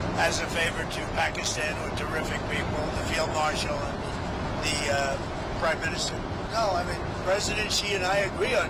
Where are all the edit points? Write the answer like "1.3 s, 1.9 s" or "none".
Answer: none